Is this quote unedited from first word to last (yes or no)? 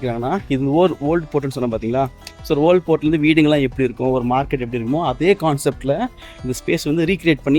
yes